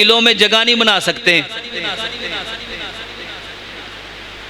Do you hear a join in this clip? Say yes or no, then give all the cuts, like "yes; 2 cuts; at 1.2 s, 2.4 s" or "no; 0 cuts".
no; 0 cuts